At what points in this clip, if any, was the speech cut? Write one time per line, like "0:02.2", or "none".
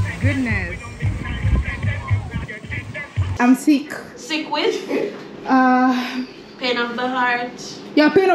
0:03.2